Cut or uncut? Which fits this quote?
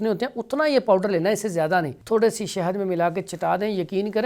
cut